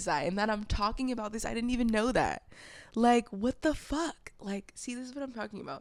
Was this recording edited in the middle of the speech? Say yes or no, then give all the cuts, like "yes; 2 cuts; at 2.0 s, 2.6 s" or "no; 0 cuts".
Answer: no; 0 cuts